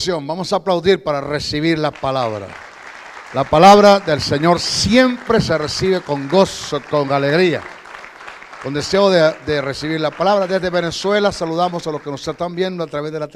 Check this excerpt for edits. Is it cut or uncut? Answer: uncut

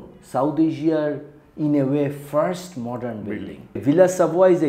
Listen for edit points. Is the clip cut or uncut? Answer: cut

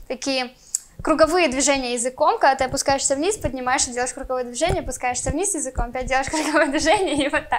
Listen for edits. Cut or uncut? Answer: uncut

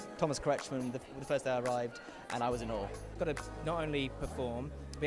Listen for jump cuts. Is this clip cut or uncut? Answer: cut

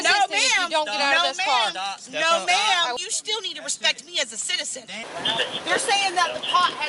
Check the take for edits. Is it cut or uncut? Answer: cut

